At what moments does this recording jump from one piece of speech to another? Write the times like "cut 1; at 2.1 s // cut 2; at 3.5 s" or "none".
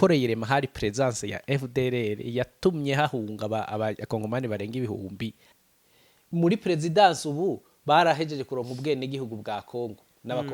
cut 1; at 5.5 s